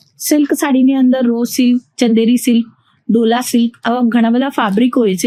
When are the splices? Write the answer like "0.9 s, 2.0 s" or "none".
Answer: none